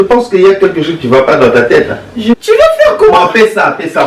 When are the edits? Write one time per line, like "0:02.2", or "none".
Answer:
0:02.4